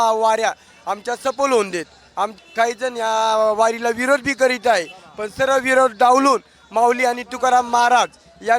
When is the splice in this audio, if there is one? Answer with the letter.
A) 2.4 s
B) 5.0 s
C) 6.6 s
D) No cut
A